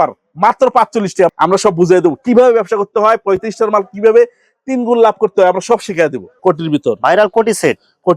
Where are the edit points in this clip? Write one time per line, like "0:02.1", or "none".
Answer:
0:01.3
0:06.4